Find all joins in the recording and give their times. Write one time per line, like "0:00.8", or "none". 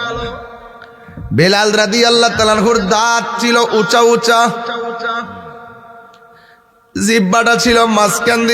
none